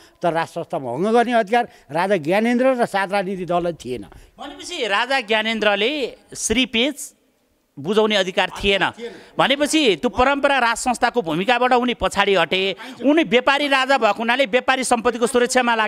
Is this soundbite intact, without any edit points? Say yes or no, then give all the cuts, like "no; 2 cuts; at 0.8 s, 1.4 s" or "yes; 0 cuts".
yes; 0 cuts